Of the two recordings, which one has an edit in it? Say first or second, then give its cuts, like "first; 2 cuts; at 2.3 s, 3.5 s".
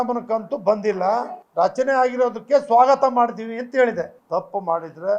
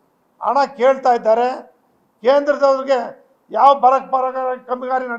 first; 2 cuts; at 1.4 s, 4.2 s